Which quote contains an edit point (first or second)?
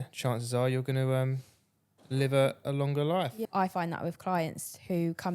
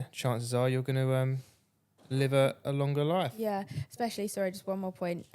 first